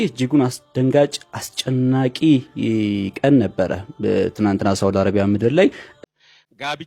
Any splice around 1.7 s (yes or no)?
no